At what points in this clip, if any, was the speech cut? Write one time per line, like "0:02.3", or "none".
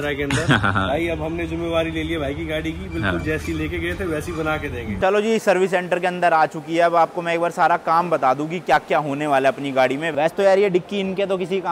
0:05.0
0:10.1